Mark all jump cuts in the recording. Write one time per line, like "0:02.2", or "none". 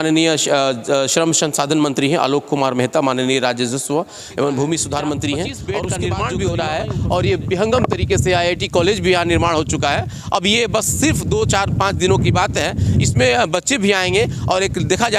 0:05.7